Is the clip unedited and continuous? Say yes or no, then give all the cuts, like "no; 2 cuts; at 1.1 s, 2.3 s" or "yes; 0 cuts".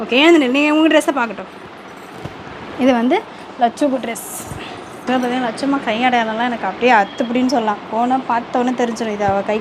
no; 1 cut; at 5.0 s